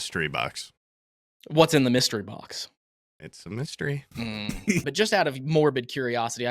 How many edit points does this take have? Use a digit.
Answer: 1